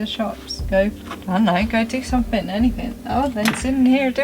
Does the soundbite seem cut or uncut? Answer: cut